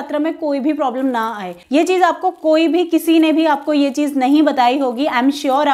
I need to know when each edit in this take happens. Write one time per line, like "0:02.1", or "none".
0:01.5